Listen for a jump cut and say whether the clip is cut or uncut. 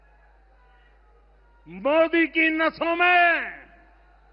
uncut